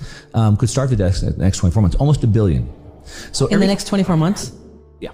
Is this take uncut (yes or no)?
yes